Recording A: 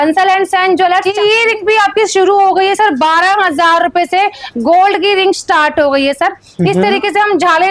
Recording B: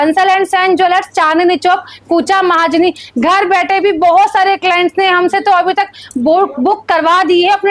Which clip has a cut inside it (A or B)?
A